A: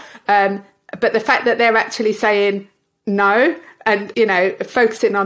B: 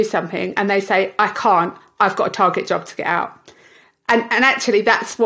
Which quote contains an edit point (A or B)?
A